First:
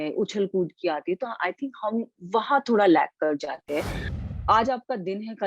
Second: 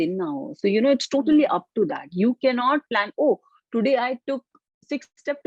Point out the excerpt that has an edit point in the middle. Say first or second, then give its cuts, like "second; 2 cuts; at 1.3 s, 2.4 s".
first; 1 cut; at 4.4 s